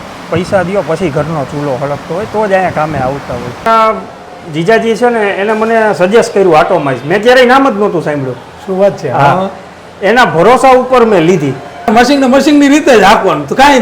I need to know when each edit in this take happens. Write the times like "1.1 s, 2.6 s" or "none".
3.7 s, 11.9 s